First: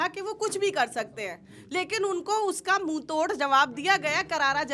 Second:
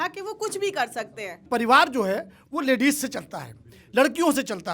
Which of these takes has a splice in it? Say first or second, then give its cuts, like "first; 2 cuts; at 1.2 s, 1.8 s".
second; 1 cut; at 1.4 s